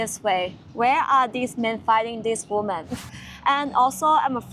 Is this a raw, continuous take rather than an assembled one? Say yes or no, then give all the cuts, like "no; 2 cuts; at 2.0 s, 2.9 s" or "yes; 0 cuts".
no; 1 cut; at 3.0 s